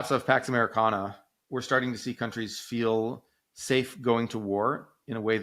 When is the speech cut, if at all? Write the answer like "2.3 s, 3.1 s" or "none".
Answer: 1.3 s